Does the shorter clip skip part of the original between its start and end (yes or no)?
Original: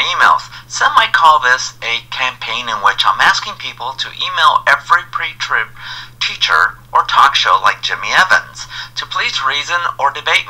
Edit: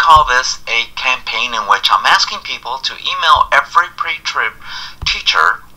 no